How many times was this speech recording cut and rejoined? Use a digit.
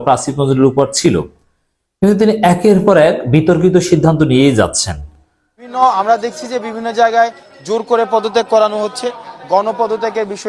1